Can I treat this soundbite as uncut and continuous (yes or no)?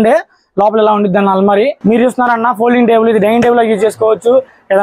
no